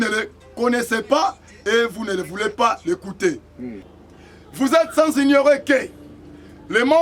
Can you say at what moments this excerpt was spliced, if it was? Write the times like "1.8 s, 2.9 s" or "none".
3.9 s